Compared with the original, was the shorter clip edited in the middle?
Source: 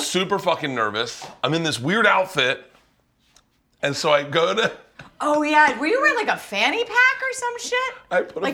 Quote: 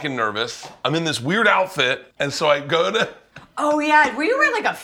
yes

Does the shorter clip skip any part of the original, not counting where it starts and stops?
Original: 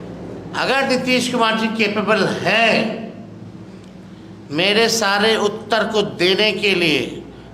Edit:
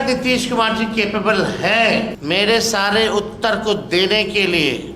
yes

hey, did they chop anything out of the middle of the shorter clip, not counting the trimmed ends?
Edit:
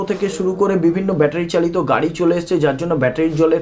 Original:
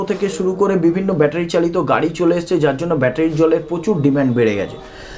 no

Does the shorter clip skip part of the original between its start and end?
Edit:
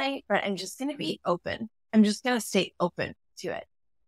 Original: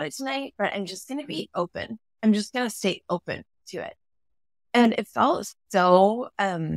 no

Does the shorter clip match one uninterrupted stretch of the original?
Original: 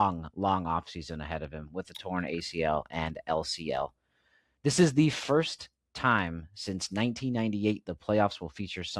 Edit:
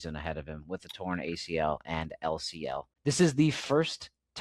no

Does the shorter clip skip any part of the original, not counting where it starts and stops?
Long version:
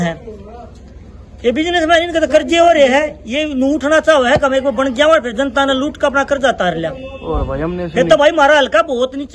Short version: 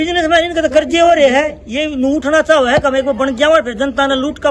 no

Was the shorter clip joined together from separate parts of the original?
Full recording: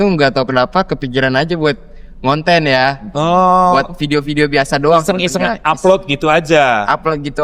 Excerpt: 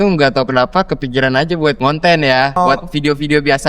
yes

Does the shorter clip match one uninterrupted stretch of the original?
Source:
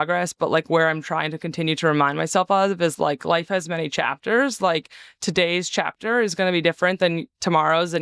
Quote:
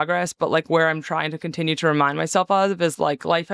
yes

